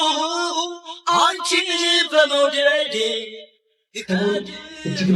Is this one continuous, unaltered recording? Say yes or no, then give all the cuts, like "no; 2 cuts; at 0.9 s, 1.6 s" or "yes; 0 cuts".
yes; 0 cuts